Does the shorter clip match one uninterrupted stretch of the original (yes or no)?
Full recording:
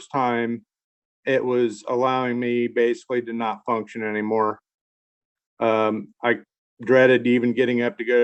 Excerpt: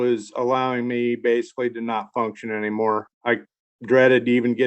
no